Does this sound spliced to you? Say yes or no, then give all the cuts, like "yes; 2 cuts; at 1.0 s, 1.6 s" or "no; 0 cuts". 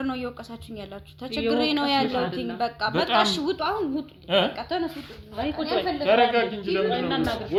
no; 0 cuts